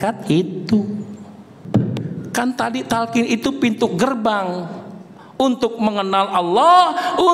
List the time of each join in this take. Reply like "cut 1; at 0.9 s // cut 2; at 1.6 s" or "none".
cut 1; at 1.6 s